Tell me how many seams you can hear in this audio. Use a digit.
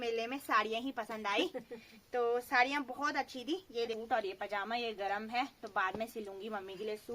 1